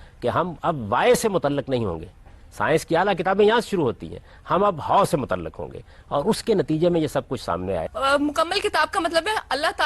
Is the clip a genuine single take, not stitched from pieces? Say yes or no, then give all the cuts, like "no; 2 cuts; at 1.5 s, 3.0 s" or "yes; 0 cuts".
no; 1 cut; at 7.9 s